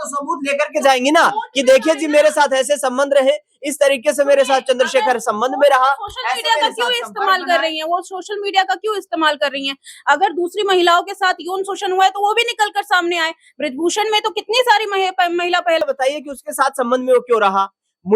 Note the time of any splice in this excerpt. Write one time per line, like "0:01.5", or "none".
0:15.8